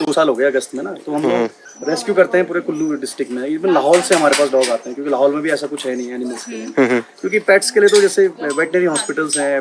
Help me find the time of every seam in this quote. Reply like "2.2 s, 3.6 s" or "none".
none